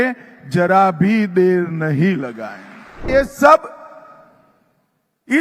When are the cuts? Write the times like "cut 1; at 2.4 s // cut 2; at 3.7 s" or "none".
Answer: cut 1; at 3.1 s